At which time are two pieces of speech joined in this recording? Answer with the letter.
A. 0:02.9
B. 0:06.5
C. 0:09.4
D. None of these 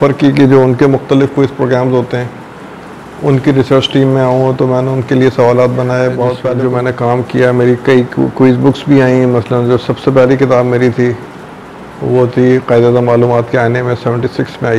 B